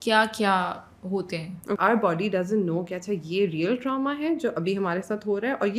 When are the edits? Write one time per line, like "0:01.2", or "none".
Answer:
0:01.8